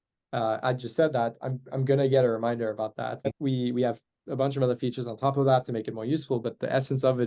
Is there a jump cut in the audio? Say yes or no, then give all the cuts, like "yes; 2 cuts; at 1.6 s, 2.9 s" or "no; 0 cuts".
yes; 1 cut; at 3.2 s